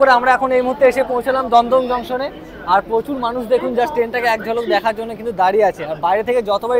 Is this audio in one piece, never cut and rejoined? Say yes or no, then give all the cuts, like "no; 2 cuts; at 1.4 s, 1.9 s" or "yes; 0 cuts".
yes; 0 cuts